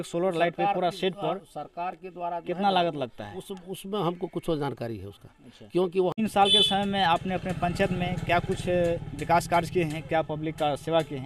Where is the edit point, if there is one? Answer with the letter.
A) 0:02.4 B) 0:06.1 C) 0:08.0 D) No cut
B